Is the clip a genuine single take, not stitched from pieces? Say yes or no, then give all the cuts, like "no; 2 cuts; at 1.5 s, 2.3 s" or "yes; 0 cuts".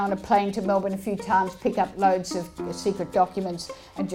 yes; 0 cuts